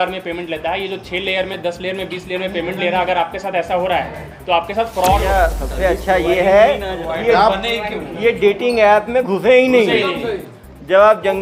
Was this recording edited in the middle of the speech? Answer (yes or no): yes